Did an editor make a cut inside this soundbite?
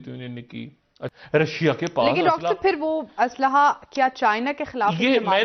yes; 1 cut; at 1.0 s

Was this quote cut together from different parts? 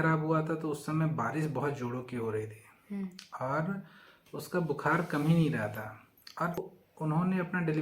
yes; 1 cut; at 6.6 s

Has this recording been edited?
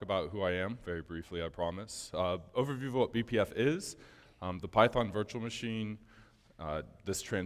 yes; 1 cut; at 2.0 s

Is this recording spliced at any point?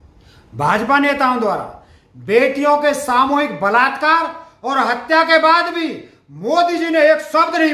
no; 0 cuts

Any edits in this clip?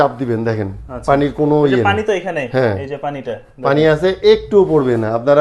no; 0 cuts

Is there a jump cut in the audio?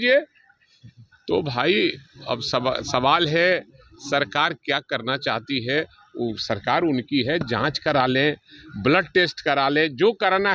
no; 0 cuts

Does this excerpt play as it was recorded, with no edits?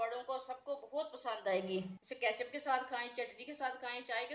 no; 1 cut; at 2.0 s

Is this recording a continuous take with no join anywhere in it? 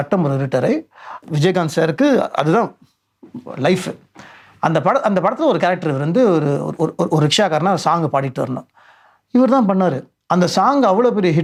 yes; 0 cuts

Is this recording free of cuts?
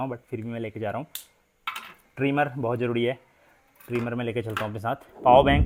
yes; 0 cuts

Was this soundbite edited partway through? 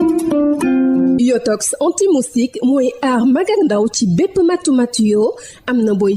yes; 1 cut; at 1.1 s

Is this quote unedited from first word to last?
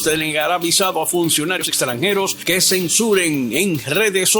no; 1 cut; at 1.7 s

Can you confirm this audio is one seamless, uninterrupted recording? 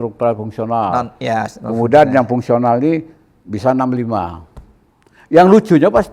yes; 0 cuts

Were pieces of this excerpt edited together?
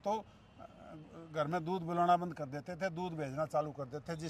no; 0 cuts

